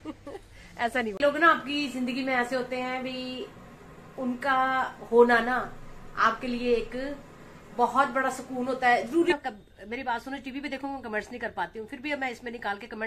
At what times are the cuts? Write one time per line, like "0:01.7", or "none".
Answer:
0:01.2
0:09.3